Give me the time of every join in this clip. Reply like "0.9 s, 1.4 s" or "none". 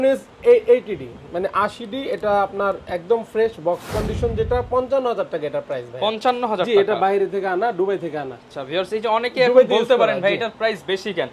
none